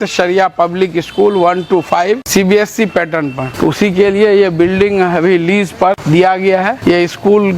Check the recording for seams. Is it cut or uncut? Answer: cut